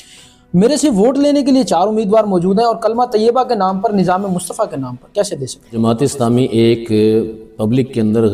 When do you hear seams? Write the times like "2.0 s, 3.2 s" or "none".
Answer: 5.8 s